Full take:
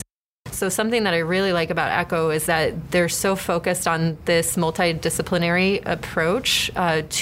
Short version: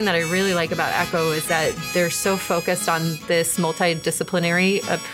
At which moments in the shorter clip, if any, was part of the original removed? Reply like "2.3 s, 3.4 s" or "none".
none